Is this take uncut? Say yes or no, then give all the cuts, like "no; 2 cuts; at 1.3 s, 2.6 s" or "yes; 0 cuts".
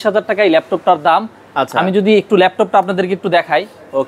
yes; 0 cuts